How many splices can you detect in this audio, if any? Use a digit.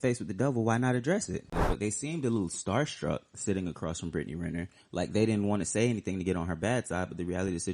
1